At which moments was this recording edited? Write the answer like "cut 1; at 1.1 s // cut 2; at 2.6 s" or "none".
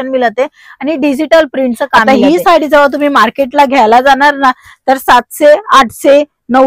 cut 1; at 2.0 s